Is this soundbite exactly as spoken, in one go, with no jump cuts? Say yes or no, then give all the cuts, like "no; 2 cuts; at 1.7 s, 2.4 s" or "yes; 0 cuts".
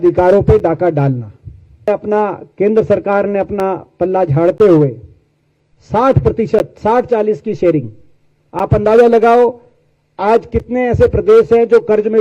no; 1 cut; at 1.9 s